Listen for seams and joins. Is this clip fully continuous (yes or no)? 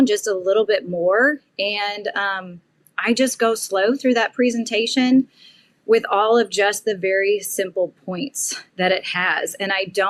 yes